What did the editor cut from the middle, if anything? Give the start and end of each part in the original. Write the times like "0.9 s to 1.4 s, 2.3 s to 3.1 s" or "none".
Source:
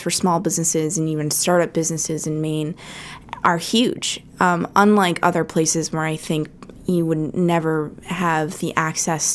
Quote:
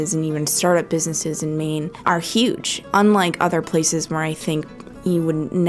2.8 s to 3.3 s, 4.2 s to 4.7 s